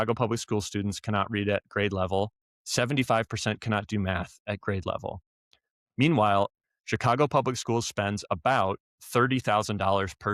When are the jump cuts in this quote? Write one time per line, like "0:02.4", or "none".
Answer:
0:06.5